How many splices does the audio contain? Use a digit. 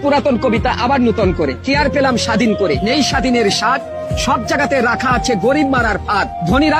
0